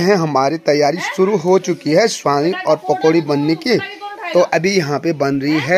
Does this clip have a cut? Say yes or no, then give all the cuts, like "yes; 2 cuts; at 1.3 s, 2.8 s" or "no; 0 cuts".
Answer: no; 0 cuts